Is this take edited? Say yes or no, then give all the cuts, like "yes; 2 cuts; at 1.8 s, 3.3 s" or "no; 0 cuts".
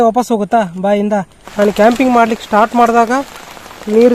yes; 1 cut; at 1.4 s